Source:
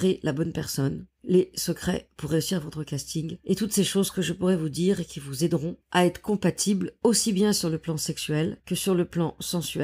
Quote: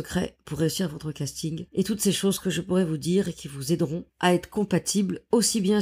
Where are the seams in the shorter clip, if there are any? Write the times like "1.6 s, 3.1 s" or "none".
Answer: none

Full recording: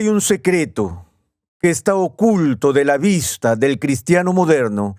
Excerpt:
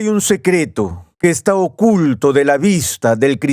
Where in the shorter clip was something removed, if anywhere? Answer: 1.0 s

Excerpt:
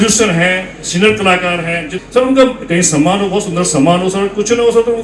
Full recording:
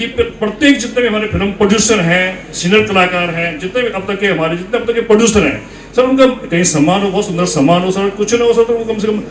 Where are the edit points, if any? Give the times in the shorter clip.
1.9 s

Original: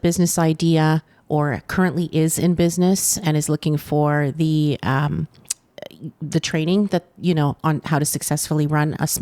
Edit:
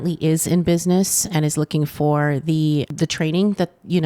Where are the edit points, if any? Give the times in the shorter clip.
2.9 s

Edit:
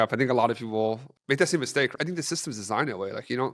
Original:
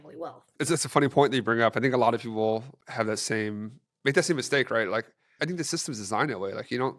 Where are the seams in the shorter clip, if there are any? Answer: 1.1 s, 1.9 s

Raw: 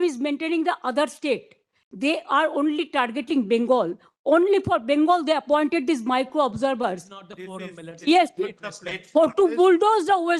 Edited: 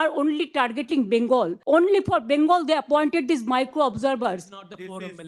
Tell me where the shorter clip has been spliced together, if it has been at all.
1.6 s

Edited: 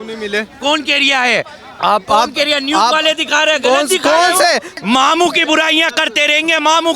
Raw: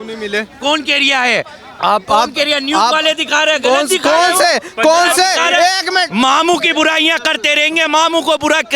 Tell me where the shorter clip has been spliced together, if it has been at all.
4.7 s

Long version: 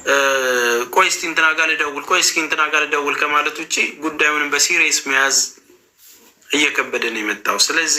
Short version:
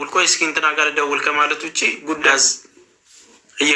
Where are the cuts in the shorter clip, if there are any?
2.3 s

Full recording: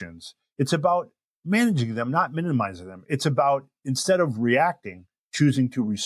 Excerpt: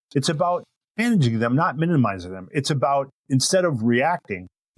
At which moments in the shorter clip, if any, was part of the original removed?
1.0 s

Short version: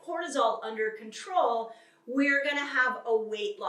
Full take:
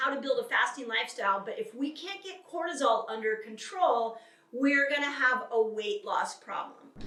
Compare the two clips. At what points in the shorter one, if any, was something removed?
none

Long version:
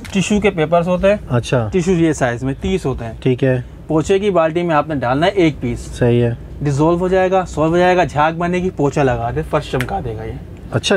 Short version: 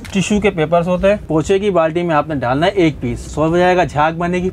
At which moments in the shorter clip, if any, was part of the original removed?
1.2 s, 3.3 s

